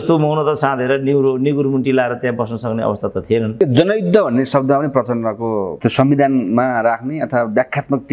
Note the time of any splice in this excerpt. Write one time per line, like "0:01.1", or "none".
0:03.6
0:05.7